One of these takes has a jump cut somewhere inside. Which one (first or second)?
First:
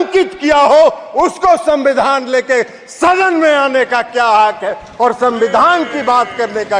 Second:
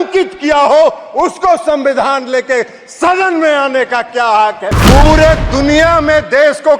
second